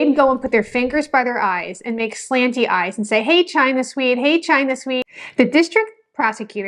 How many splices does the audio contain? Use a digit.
1